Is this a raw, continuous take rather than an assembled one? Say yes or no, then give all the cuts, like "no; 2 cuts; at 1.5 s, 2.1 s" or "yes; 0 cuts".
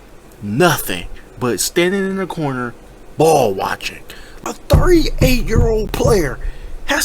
no; 1 cut; at 4.4 s